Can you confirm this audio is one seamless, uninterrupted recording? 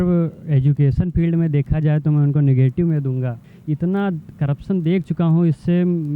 no; 1 cut; at 3.5 s

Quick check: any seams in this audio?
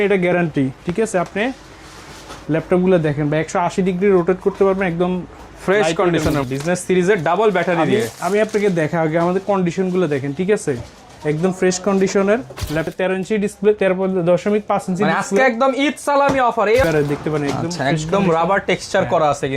yes; 3 cuts; at 6.4 s, 12.9 s, 16.8 s

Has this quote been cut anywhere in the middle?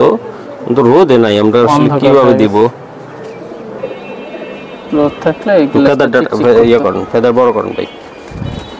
no; 0 cuts

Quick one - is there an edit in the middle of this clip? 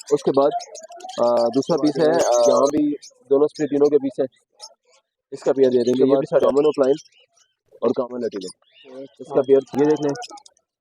yes; 3 cuts; at 2.6 s, 6.5 s, 9.7 s

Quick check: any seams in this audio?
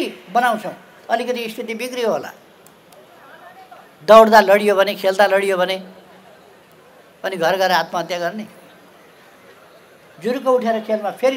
no; 0 cuts

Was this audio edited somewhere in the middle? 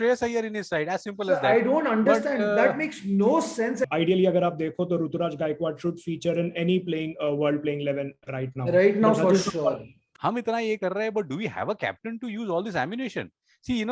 yes; 2 cuts; at 3.9 s, 10.1 s

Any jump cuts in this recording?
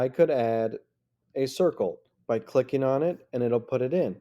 yes; 1 cut; at 2.1 s

